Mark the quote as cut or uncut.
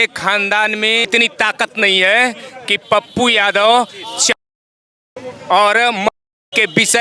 uncut